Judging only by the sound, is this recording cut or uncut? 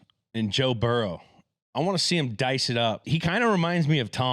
cut